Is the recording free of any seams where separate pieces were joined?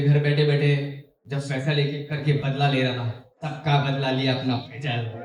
yes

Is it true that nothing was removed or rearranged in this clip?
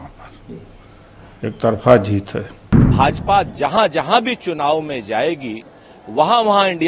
no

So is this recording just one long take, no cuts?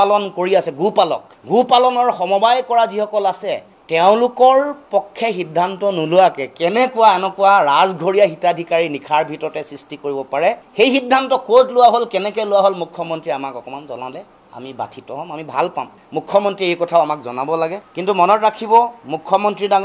yes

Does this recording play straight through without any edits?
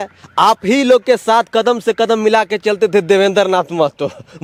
yes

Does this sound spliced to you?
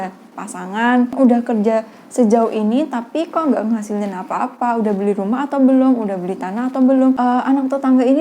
yes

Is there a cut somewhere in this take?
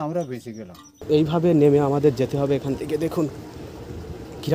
yes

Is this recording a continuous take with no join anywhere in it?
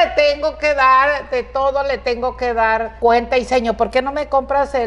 no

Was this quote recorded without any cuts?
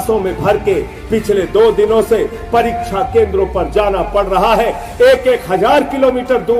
yes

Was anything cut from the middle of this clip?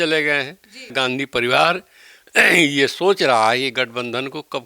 yes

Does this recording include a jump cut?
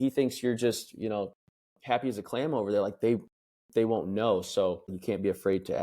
yes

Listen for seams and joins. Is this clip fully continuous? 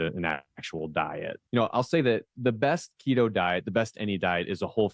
no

